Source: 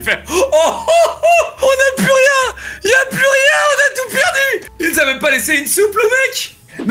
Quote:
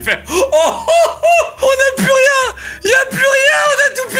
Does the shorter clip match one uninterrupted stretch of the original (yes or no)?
yes